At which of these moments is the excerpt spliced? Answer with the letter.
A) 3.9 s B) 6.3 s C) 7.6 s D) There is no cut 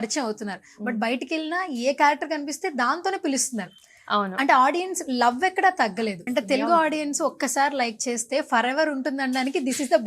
B